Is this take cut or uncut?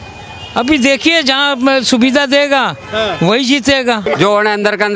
cut